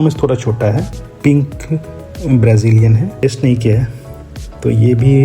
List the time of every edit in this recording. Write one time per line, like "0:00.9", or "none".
0:01.1
0:03.2